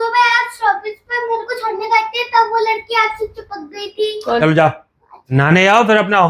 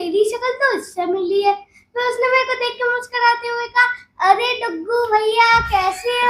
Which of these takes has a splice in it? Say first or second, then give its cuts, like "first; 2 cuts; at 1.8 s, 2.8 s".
first; 2 cuts; at 4.4 s, 5.3 s